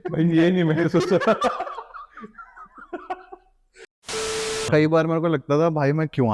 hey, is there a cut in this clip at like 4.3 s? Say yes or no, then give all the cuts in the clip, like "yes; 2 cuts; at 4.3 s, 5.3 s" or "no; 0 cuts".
yes; 1 cut; at 4.3 s